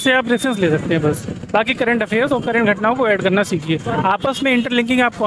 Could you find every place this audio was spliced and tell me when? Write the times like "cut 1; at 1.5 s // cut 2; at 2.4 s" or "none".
none